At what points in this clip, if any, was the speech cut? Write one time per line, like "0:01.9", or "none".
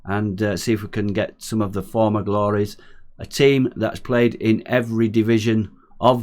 none